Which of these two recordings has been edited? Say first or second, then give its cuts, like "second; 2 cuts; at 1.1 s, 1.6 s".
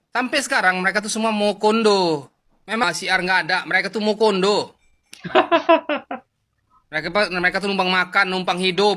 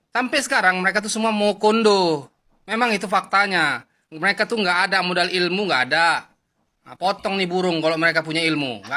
first; 1 cut; at 2.8 s